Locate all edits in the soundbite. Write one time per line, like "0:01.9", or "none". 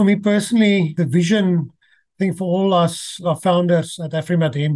0:00.9
0:03.2